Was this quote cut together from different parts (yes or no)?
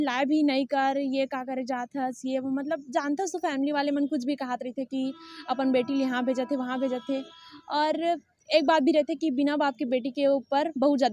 no